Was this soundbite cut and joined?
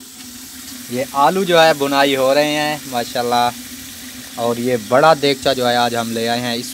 no; 0 cuts

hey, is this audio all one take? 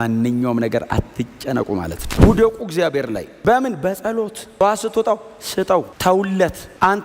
no; 1 cut; at 2.1 s

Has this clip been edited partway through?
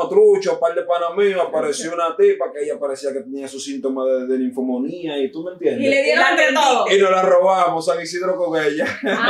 no; 0 cuts

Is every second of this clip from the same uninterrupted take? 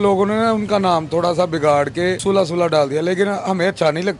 no; 1 cut; at 2.2 s

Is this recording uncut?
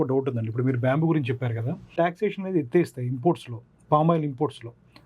no; 1 cut; at 1.9 s

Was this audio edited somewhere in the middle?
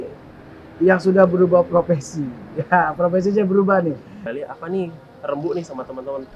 yes; 1 cut; at 4.2 s

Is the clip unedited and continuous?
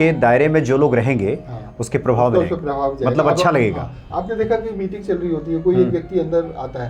yes; 0 cuts

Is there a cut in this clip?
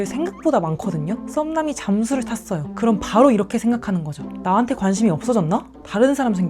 yes; 2 cuts; at 1.2 s, 2.7 s

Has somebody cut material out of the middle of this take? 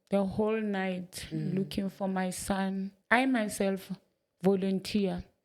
yes; 1 cut; at 2.9 s

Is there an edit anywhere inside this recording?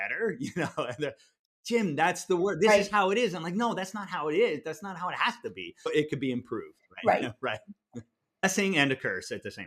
yes; 2 cuts; at 5.9 s, 8.4 s

